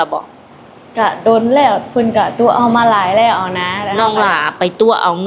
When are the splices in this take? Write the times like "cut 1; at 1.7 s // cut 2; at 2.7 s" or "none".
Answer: cut 1; at 3.8 s

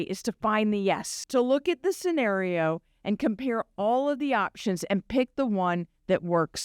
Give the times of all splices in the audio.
none

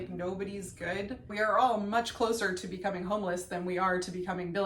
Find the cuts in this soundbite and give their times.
cut 1; at 1.3 s

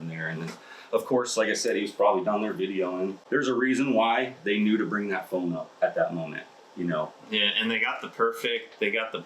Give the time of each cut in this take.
cut 1; at 3.2 s

